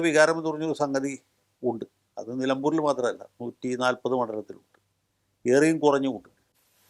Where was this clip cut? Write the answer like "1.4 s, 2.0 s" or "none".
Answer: none